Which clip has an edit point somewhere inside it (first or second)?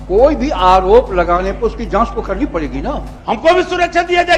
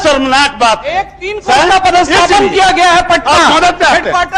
first